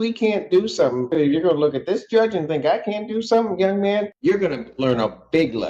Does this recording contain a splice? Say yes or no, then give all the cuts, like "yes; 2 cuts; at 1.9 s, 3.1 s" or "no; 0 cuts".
yes; 2 cuts; at 1.1 s, 4.1 s